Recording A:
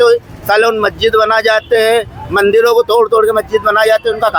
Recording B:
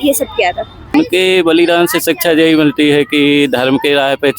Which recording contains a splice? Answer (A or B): B